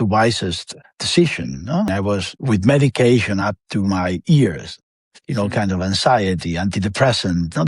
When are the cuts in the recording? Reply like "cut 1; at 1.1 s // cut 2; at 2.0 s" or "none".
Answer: cut 1; at 1.9 s